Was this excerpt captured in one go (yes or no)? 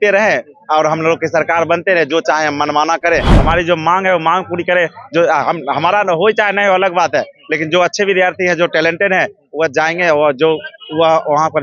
no